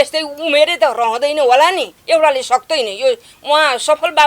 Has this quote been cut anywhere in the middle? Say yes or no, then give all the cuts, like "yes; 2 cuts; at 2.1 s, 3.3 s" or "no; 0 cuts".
yes; 1 cut; at 1.9 s